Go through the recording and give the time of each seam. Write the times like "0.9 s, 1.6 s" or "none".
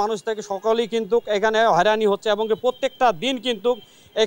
none